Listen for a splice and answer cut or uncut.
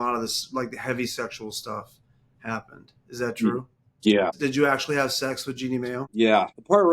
cut